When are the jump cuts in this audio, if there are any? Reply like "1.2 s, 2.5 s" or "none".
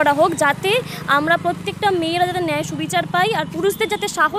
none